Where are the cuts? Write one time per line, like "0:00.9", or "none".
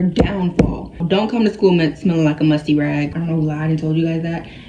0:01.0
0:03.1